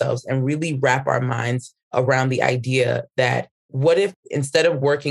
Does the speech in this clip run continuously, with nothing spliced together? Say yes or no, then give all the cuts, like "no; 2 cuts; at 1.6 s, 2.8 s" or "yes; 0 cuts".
no; 1 cut; at 4.2 s